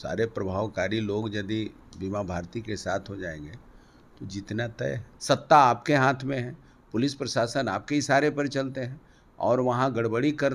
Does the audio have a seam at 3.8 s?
no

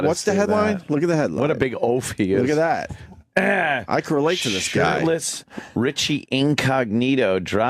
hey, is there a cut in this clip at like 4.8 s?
yes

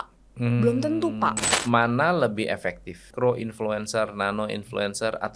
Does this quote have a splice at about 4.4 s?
no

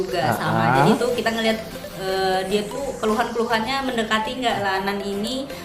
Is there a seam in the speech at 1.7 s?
no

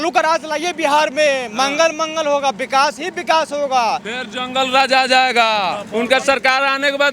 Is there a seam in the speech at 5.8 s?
yes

